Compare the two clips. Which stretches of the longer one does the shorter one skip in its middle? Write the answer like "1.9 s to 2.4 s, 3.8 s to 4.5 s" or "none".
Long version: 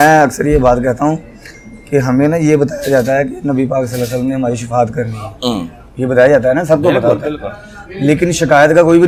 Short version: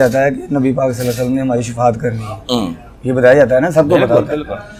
none